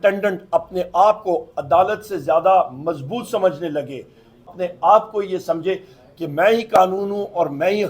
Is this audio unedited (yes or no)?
no